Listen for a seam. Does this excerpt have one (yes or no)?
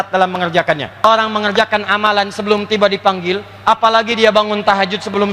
yes